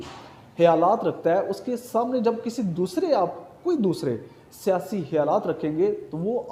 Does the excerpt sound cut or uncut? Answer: uncut